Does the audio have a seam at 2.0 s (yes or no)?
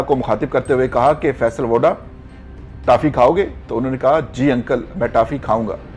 no